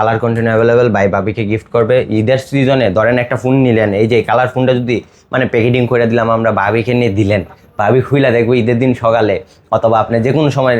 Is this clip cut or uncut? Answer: uncut